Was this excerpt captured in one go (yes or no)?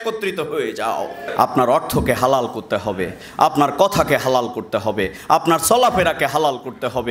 no